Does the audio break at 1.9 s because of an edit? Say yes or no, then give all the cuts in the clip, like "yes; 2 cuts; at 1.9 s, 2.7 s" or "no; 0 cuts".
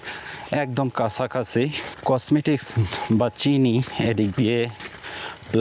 yes; 1 cut; at 1.9 s